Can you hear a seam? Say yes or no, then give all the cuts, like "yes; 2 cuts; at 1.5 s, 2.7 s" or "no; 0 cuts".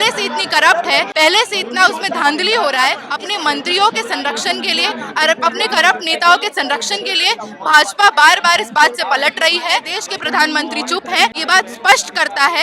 yes; 4 cuts; at 1.1 s, 3.1 s, 9.9 s, 11.4 s